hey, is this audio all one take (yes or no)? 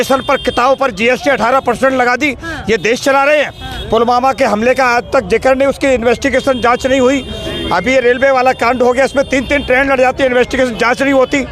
yes